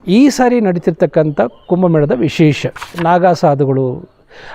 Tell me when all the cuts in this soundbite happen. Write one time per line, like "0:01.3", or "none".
0:02.9

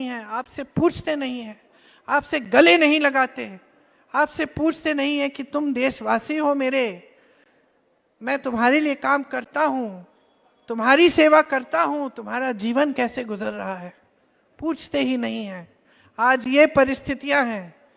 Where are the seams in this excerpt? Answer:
none

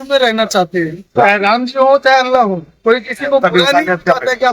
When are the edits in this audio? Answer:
0:01.0

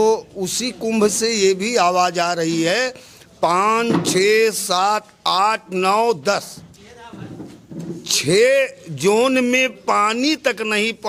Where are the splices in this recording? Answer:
none

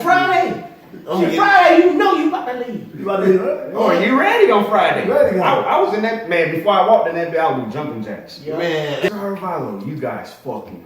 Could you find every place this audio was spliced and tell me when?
0:09.1

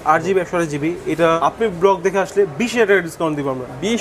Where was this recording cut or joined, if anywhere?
0:01.4

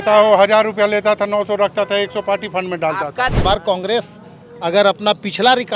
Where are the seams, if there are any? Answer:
0:03.4

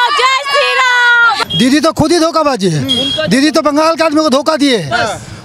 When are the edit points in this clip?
0:01.4

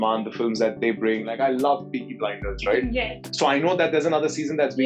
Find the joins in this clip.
0:01.3

